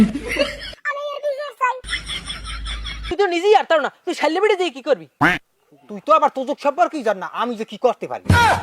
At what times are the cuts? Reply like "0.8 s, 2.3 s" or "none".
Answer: 3.1 s